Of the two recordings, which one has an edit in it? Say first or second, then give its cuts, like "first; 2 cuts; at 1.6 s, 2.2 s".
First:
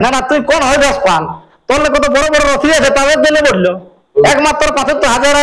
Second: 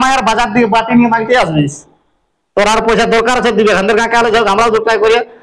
first; 1 cut; at 4.2 s